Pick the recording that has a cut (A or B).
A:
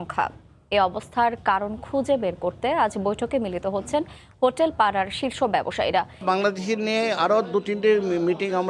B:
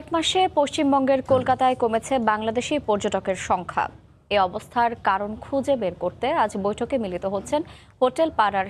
A